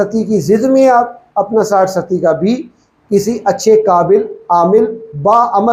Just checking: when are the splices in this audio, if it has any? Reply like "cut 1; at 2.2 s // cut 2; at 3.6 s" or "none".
none